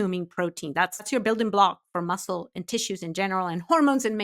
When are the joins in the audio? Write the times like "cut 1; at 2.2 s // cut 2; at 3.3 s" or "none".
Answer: cut 1; at 1.1 s